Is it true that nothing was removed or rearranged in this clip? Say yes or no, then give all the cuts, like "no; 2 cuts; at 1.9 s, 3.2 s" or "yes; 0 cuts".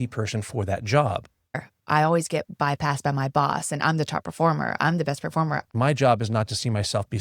no; 2 cuts; at 1.6 s, 5.6 s